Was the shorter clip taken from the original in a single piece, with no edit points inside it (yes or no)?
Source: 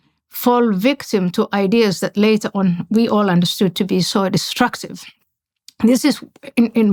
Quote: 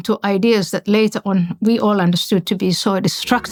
yes